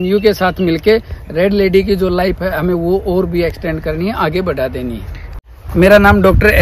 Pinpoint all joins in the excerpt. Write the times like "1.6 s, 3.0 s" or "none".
5.3 s